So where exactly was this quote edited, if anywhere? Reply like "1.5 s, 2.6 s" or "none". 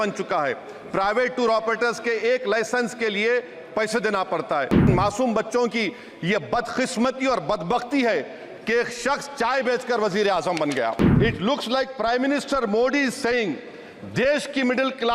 4.9 s, 11.0 s